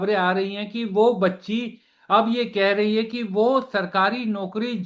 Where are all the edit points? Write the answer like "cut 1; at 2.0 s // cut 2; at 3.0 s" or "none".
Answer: none